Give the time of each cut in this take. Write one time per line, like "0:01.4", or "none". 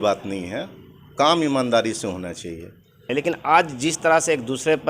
0:03.1

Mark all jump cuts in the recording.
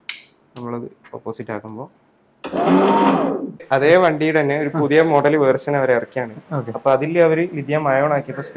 0:03.6

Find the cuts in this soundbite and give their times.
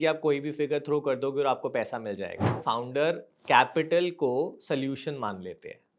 0:02.6

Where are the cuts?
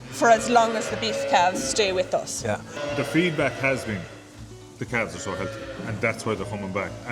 0:02.8

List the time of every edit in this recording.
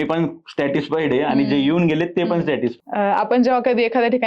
0:02.8

